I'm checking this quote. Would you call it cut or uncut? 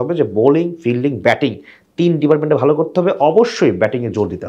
uncut